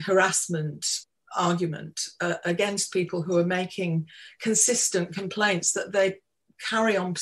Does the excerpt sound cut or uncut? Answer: cut